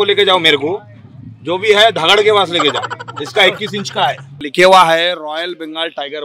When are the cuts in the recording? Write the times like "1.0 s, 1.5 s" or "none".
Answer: 4.4 s